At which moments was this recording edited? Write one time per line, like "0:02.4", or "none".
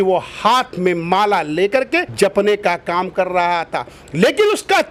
none